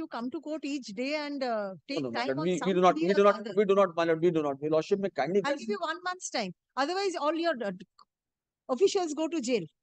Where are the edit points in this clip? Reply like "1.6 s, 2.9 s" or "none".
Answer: none